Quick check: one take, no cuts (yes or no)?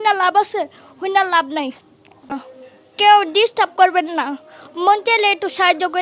no